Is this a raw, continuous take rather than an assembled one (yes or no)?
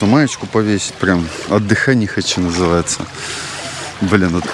yes